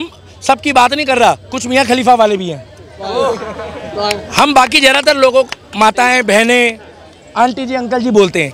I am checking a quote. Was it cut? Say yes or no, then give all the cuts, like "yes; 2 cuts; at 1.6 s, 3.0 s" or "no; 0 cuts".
no; 0 cuts